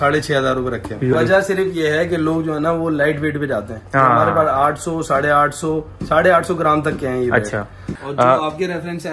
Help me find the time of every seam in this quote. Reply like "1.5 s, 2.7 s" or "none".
1.1 s, 7.9 s